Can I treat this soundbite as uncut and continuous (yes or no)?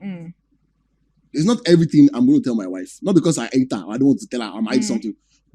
yes